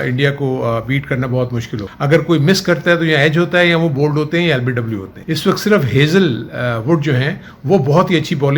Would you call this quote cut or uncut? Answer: cut